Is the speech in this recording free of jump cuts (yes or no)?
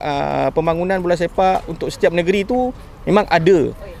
yes